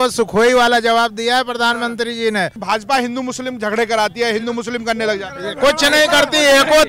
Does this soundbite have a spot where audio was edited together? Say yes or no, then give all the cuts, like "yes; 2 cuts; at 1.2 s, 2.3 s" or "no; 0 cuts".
yes; 1 cut; at 2.6 s